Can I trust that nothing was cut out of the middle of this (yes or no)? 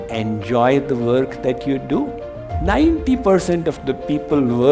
no